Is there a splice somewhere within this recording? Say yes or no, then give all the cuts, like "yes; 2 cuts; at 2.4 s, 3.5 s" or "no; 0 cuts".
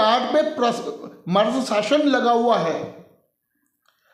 no; 0 cuts